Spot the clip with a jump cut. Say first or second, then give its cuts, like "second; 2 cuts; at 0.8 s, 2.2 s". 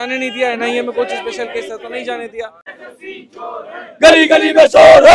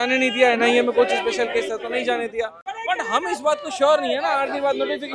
first; 1 cut; at 2.7 s